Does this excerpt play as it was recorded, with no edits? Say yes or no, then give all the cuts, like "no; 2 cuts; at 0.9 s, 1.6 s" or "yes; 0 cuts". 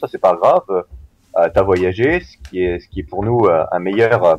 yes; 0 cuts